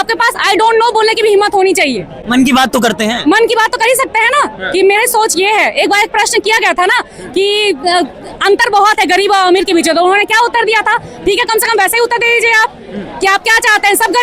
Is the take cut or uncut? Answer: uncut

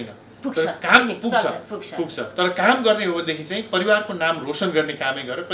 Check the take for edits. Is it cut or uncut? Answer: uncut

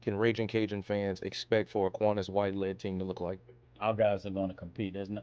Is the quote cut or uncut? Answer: cut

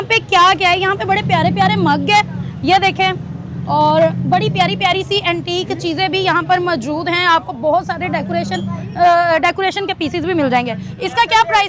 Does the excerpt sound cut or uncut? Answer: uncut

